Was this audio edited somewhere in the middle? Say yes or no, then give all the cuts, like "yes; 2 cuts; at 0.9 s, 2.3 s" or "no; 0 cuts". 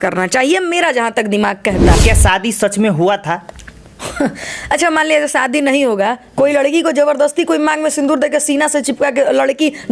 yes; 1 cut; at 2.0 s